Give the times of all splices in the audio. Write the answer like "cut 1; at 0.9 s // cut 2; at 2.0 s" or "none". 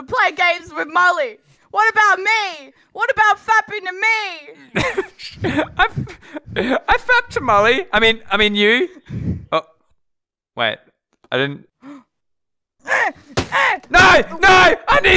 none